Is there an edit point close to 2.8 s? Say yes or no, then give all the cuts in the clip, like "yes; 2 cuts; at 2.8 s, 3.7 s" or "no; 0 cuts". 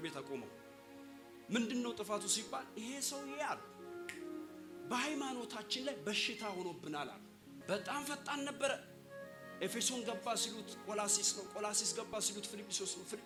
no; 0 cuts